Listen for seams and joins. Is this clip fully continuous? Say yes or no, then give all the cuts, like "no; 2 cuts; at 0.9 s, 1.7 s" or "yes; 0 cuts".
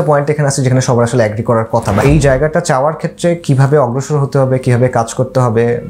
no; 1 cut; at 2.0 s